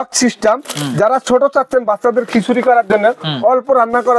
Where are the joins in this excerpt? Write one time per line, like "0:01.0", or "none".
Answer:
none